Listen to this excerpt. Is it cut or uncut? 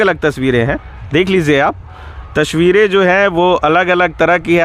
uncut